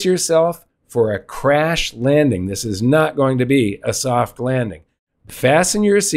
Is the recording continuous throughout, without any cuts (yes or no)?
no